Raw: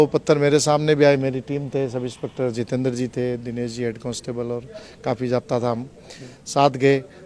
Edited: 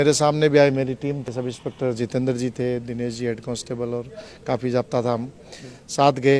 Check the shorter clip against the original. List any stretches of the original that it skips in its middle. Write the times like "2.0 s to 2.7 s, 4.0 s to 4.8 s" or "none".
1.7 s to 1.9 s